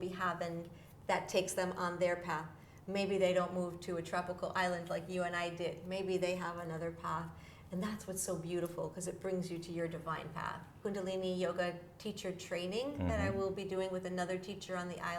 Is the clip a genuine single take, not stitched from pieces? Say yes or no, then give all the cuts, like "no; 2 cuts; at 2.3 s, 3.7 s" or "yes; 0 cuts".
no; 1 cut; at 10.8 s